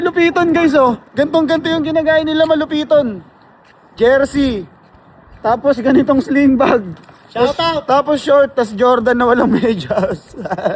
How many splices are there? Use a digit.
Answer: 0